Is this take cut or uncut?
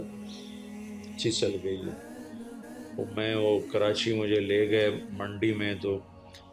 cut